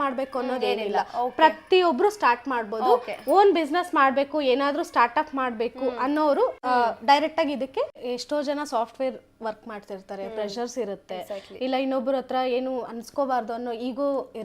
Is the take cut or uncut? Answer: cut